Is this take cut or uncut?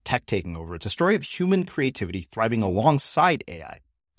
uncut